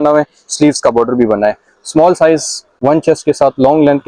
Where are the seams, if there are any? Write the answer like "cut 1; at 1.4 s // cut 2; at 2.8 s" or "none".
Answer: cut 1; at 2.7 s